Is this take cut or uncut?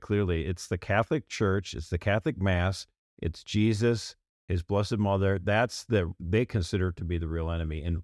uncut